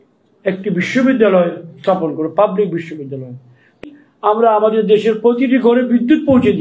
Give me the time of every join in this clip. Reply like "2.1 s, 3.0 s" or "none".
3.8 s